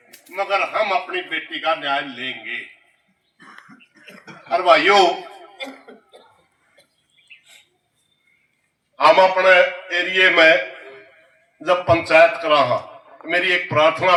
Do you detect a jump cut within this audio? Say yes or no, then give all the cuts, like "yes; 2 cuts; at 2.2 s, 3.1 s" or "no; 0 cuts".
no; 0 cuts